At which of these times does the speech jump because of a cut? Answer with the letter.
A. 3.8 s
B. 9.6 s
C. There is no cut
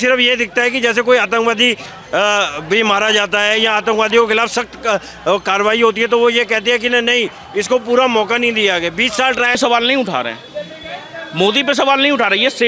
B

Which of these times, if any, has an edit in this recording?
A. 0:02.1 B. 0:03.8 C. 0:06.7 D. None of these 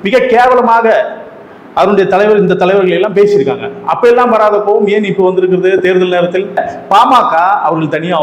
C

